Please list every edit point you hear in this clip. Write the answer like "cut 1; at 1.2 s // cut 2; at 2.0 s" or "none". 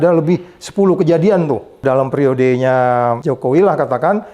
cut 1; at 1.8 s // cut 2; at 3.2 s